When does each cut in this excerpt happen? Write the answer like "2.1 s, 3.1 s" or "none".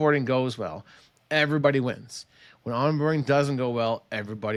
none